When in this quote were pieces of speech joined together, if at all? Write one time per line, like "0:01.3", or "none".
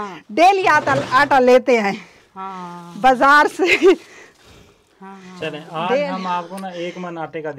none

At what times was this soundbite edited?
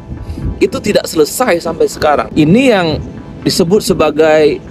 0:02.3

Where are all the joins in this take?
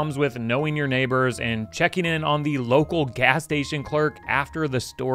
none

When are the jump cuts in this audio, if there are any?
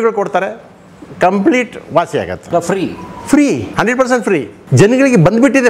0:02.4
0:04.2

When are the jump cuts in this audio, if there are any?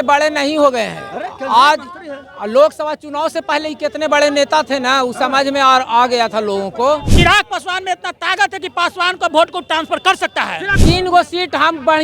0:07.1
0:10.7

